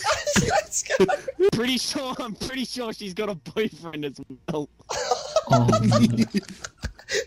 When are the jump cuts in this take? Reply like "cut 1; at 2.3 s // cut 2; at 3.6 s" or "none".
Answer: cut 1; at 1.5 s